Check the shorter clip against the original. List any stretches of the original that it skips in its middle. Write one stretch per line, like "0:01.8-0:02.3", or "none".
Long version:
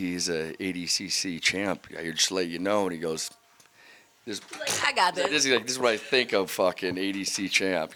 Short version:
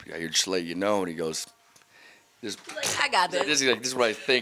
none